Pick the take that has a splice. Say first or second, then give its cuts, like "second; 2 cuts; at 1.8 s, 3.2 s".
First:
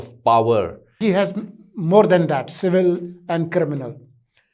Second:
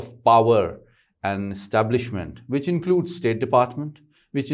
first; 1 cut; at 1.0 s